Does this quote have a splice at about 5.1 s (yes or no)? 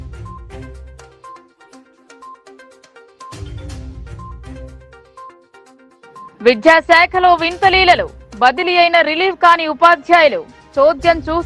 yes